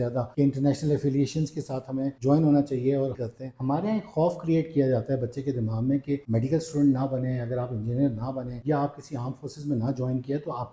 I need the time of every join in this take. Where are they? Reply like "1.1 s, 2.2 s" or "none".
3.3 s, 6.2 s